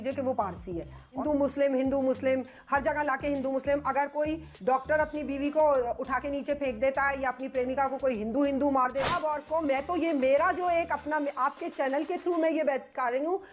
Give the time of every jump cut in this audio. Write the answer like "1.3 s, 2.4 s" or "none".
1.2 s, 9.1 s